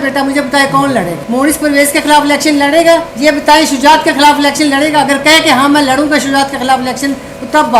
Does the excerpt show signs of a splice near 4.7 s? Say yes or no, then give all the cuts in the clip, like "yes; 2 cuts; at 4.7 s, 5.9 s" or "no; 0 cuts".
no; 2 cuts; at 1.2 s, 3.1 s